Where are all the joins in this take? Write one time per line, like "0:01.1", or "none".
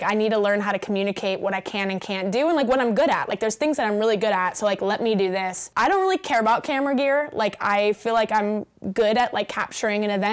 0:05.6